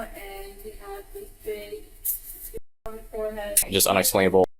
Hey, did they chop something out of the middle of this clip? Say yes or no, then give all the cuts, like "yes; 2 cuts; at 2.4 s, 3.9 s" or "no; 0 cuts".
yes; 1 cut; at 3.7 s